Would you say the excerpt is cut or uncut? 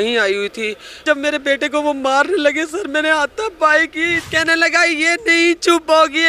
cut